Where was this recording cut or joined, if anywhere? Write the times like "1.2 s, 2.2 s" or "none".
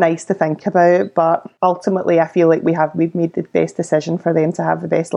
1.5 s